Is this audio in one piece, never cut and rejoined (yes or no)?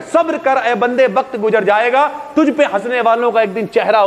yes